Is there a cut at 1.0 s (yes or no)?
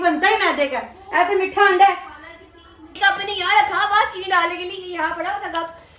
no